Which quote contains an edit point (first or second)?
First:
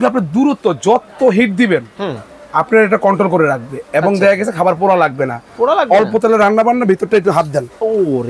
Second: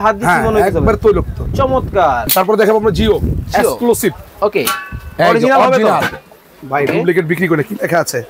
second